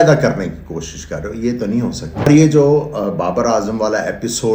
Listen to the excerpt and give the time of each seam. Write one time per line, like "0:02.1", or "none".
0:02.3